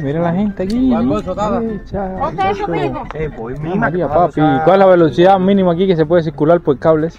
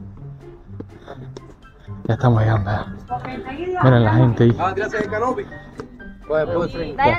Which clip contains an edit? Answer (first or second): second